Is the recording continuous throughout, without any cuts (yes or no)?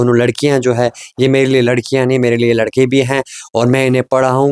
yes